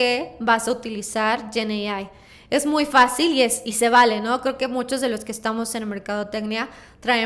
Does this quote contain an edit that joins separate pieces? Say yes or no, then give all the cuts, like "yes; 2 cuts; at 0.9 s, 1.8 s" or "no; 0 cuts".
no; 0 cuts